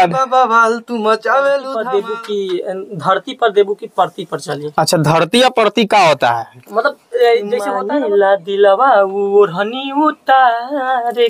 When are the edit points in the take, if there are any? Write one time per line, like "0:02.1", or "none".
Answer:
0:01.8
0:07.8